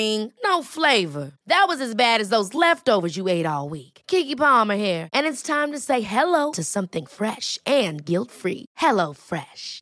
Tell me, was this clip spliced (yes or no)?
no